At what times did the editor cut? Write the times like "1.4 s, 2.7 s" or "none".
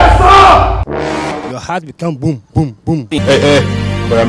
1.3 s, 3.0 s